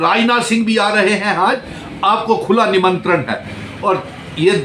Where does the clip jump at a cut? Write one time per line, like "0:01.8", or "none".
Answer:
none